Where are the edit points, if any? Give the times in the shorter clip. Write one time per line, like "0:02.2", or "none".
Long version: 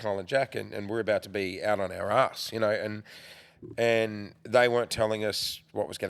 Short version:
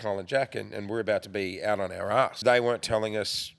0:02.4